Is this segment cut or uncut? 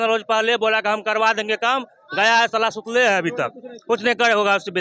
uncut